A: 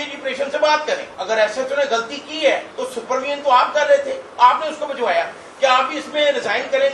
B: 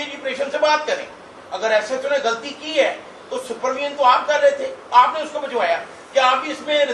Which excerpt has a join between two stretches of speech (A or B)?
A